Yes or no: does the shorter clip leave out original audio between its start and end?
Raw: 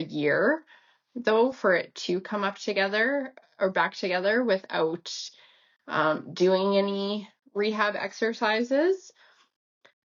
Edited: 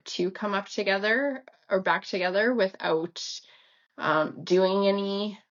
no